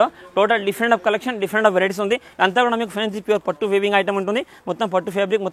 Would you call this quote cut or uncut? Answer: uncut